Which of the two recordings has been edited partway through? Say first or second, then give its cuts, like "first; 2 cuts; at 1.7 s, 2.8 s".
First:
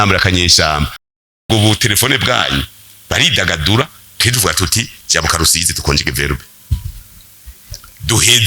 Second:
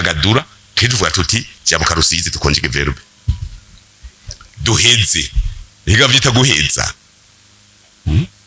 first; 1 cut; at 1.3 s